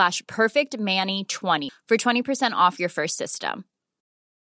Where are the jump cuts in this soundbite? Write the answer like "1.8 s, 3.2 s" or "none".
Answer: 1.6 s